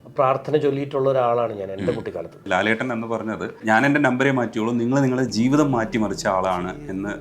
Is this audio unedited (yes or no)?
no